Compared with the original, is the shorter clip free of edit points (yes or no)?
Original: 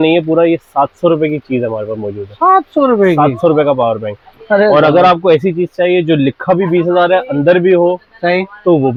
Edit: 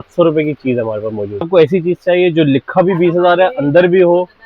no